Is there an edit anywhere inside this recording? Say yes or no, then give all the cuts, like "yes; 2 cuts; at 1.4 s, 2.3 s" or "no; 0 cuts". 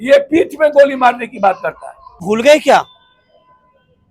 yes; 1 cut; at 2.2 s